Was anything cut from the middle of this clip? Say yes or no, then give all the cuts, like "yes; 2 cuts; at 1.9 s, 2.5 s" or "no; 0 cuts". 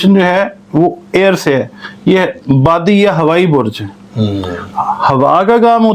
no; 0 cuts